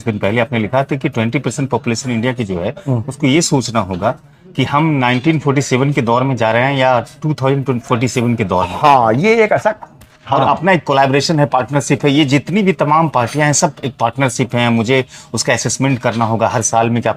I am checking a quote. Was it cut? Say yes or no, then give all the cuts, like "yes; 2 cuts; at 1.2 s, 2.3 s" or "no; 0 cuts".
no; 0 cuts